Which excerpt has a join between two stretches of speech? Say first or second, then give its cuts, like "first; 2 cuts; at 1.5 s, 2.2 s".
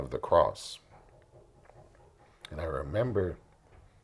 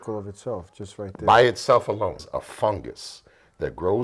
second; 1 cut; at 2.2 s